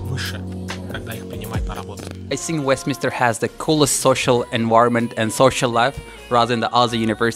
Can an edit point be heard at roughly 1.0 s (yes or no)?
no